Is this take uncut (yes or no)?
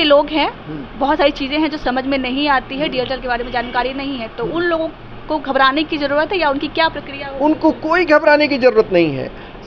yes